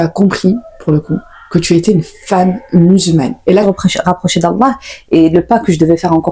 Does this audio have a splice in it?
yes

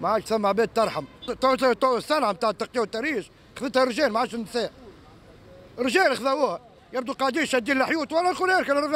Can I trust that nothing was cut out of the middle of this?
no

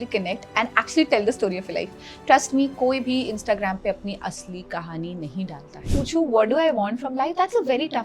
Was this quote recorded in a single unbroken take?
no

